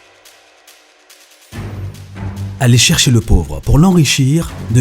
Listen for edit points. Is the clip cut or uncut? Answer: cut